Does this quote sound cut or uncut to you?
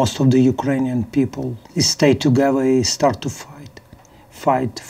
cut